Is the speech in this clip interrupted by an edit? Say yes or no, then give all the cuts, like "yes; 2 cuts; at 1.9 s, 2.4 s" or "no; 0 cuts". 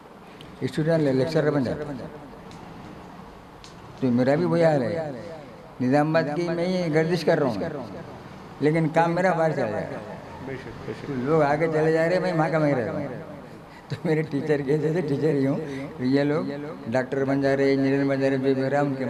no; 0 cuts